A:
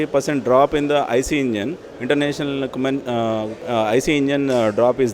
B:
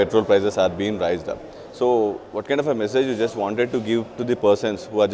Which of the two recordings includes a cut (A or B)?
A